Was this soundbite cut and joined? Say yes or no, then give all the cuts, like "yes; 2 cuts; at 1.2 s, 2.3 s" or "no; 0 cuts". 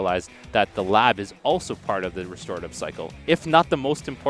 no; 0 cuts